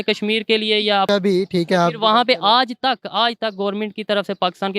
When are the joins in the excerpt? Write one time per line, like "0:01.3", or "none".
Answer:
0:01.1